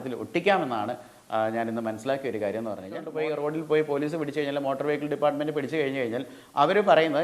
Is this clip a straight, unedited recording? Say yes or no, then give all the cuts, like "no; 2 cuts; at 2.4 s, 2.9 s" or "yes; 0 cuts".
no; 1 cut; at 3.1 s